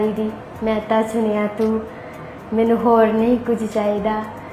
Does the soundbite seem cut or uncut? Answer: uncut